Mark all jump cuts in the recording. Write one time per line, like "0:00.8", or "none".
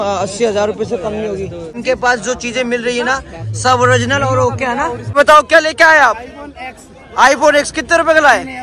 0:01.4
0:05.2